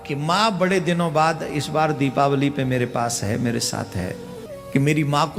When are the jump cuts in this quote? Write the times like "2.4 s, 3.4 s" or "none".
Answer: 4.5 s